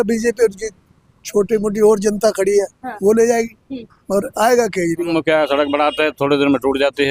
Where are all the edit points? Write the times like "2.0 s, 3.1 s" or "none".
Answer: 5.1 s